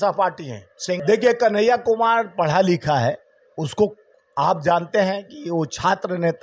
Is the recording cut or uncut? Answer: cut